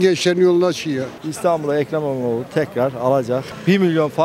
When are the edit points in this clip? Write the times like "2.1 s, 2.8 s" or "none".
1.1 s